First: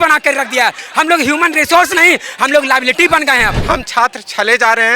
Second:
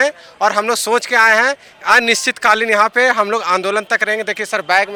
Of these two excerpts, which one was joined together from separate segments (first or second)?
first